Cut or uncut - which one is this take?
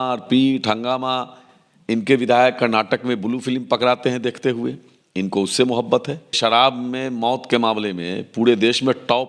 cut